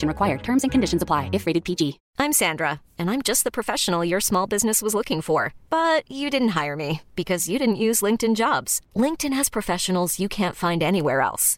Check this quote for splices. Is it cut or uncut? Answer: cut